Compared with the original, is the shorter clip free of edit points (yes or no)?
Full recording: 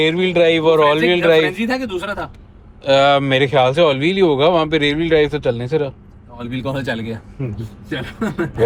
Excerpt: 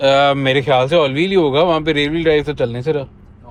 yes